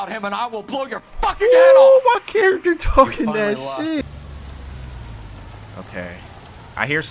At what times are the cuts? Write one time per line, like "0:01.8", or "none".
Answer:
0:04.0